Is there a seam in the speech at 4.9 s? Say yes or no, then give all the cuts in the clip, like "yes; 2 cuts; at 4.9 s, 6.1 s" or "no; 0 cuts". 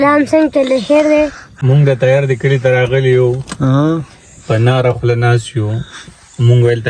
no; 1 cut; at 1.5 s